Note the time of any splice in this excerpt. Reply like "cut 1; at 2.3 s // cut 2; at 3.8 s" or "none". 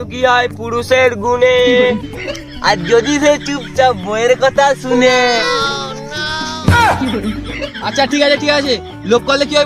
cut 1; at 7.7 s